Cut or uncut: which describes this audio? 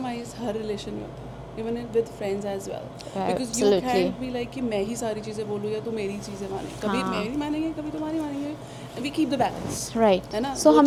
uncut